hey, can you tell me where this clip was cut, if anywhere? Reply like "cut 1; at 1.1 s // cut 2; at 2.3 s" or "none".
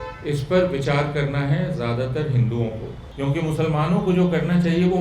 cut 1; at 3.0 s